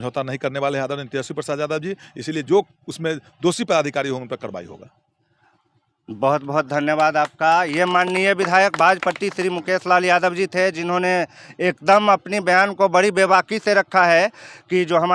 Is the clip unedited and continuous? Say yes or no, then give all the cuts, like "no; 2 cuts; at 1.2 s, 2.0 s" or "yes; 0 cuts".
yes; 0 cuts